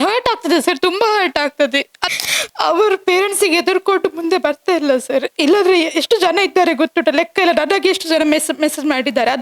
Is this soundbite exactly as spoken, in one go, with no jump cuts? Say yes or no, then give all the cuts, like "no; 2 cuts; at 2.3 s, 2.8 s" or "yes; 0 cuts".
no; 1 cut; at 2.0 s